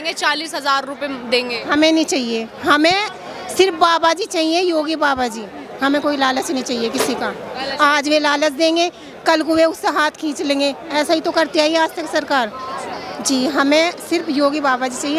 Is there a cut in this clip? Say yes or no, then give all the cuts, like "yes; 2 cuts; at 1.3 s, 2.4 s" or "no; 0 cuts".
no; 0 cuts